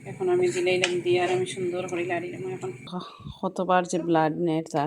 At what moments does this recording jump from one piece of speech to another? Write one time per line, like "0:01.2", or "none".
0:03.1